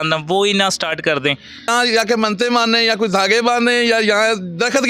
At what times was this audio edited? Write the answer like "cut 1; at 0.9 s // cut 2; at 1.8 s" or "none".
cut 1; at 1.7 s